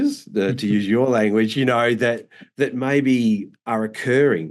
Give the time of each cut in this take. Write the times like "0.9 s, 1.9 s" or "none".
none